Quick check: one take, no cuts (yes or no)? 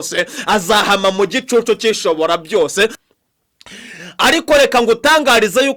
no